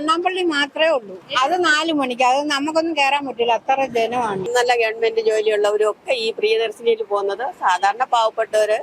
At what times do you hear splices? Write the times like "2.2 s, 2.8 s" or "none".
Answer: 1.2 s, 4.5 s